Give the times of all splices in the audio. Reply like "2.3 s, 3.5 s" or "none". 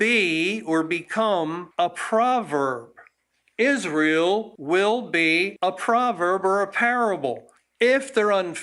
4.5 s, 7.7 s